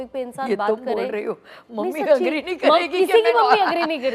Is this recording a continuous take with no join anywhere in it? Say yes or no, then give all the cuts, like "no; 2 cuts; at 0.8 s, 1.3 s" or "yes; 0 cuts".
yes; 0 cuts